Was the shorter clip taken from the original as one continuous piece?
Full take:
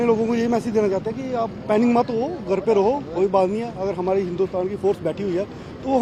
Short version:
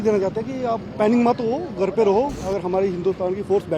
no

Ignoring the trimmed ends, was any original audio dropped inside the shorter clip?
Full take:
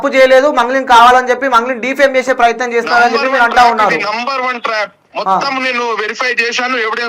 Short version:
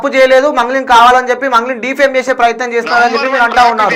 no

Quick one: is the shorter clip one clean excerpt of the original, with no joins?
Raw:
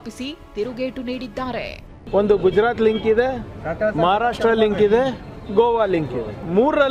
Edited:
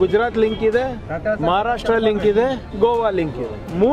no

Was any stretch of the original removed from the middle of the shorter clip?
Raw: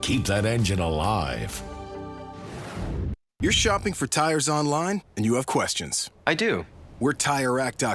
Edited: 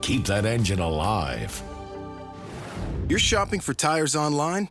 yes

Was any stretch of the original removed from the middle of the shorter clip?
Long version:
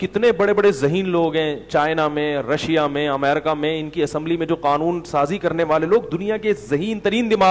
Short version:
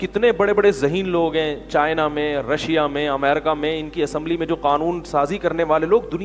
no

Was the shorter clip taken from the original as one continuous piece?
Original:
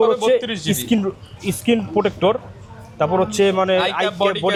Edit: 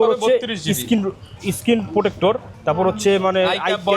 no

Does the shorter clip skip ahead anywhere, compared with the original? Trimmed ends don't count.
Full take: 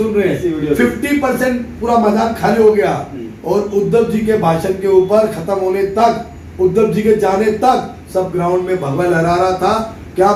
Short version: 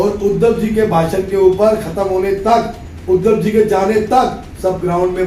no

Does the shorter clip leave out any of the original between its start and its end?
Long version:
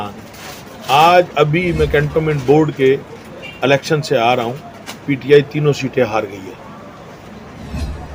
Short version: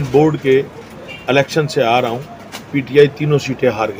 no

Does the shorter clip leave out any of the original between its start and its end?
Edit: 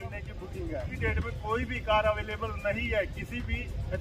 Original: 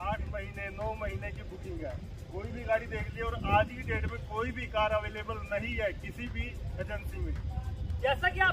yes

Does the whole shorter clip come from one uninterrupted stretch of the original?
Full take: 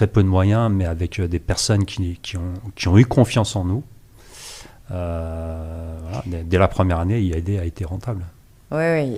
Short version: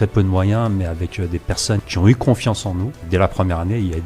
no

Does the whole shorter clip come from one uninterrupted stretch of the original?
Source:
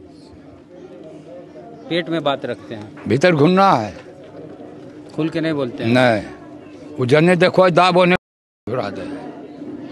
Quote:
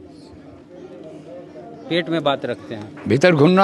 yes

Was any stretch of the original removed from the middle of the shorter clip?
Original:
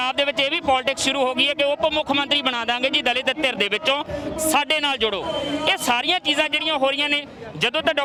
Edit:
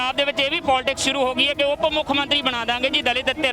no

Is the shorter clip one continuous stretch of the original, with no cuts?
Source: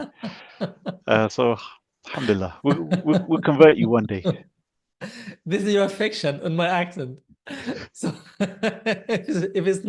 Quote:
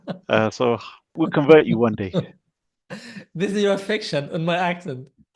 no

